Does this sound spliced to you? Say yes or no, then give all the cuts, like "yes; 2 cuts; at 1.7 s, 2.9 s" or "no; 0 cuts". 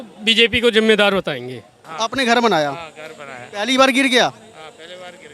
yes; 1 cut; at 1.8 s